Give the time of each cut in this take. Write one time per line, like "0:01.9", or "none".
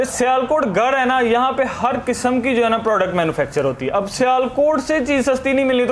none

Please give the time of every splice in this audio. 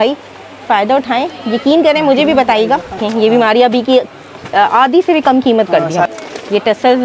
0:03.0
0:06.1

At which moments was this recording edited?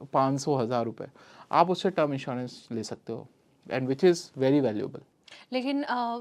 none

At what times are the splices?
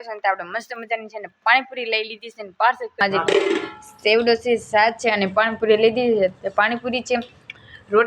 0:03.0

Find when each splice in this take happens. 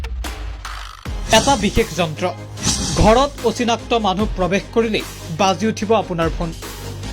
0:01.3

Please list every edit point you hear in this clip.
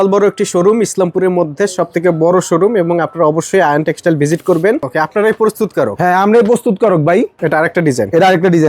0:04.9
0:07.4

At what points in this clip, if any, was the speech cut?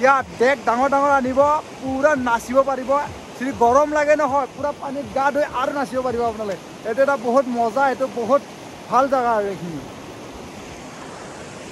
none

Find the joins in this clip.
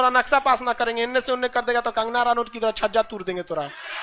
none

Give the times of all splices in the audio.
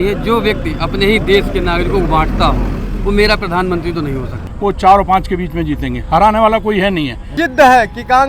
0:04.4
0:07.2

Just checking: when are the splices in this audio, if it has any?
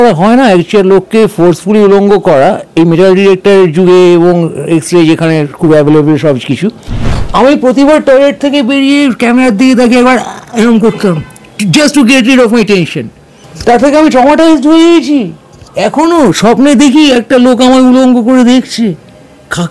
0:07.3
0:13.5

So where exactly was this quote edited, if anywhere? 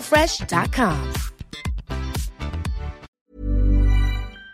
0:03.1

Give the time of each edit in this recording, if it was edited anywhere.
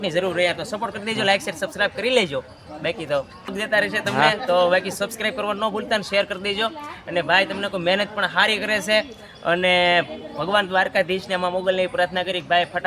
0:03.6

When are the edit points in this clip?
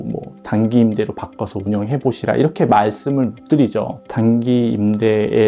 0:04.0

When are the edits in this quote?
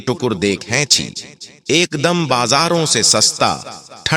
0:01.5

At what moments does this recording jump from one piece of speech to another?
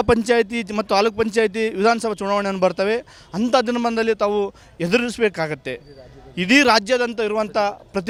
none

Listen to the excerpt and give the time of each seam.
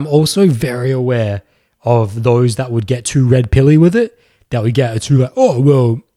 none

